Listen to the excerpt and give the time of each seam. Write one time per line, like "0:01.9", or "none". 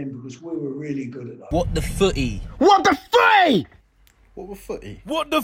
0:01.3